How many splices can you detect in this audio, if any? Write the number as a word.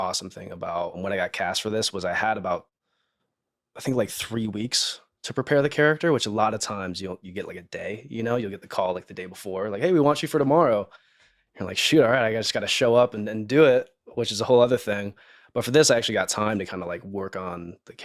one